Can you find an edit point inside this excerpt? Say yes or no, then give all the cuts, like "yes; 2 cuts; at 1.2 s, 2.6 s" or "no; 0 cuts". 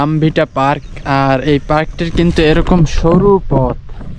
no; 0 cuts